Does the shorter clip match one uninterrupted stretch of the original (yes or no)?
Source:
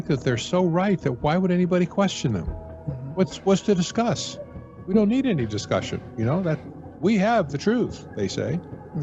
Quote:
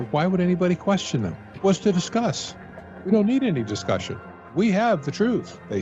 no